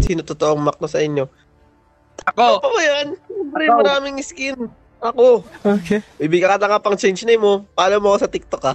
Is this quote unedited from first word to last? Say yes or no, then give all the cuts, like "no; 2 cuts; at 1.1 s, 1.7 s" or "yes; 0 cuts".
yes; 0 cuts